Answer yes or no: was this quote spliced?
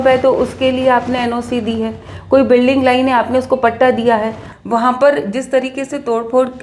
yes